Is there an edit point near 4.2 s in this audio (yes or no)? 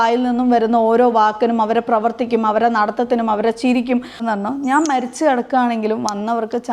yes